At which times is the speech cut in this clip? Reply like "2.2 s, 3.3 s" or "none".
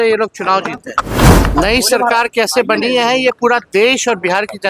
1.1 s